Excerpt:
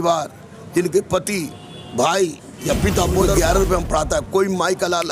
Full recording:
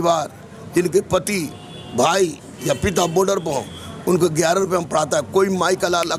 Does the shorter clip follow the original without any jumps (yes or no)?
no